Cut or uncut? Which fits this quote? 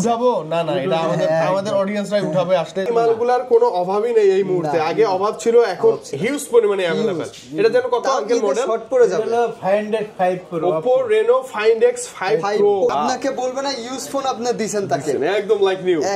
cut